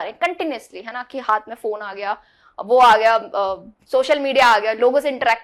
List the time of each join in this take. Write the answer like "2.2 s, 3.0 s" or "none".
none